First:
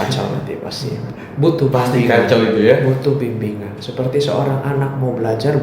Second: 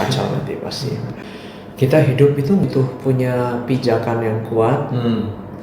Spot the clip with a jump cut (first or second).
second